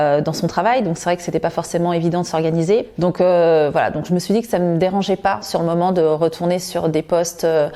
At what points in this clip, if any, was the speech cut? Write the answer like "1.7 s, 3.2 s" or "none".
2.9 s